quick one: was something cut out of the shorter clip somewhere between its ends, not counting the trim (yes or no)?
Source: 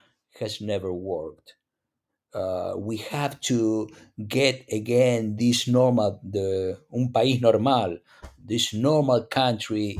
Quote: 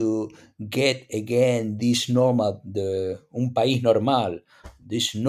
no